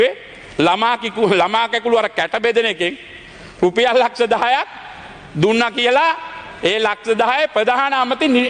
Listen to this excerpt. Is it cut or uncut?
uncut